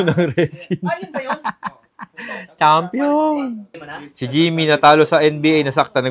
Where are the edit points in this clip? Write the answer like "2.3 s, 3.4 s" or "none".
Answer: 3.6 s